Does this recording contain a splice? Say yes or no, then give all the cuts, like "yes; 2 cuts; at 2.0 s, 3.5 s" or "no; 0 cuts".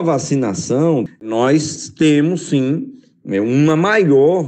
yes; 1 cut; at 1.2 s